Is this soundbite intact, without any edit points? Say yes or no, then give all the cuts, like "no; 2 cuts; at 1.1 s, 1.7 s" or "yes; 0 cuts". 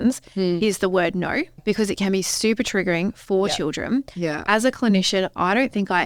no; 1 cut; at 1.6 s